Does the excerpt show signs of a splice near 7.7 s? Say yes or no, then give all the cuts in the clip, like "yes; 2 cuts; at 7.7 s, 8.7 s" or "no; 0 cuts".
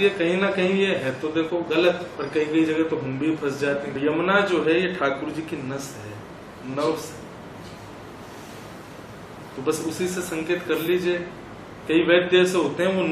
no; 2 cuts; at 2.1 s, 3.9 s